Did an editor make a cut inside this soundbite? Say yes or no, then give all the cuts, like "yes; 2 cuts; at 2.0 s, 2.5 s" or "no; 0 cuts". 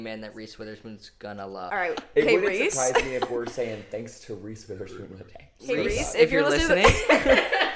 yes; 1 cut; at 1.7 s